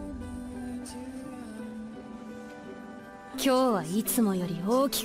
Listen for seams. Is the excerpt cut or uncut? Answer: cut